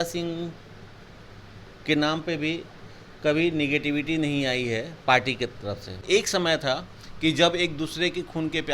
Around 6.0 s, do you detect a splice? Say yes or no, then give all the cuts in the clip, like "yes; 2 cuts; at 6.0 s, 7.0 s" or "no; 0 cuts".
yes; 1 cut; at 6.0 s